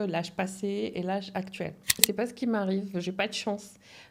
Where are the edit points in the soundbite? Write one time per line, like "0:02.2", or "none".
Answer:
0:02.0